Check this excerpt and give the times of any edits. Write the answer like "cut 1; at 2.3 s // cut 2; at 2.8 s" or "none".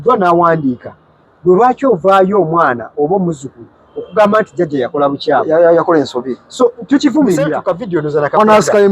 cut 1; at 7.6 s